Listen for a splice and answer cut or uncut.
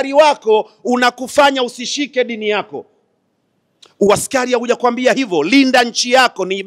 uncut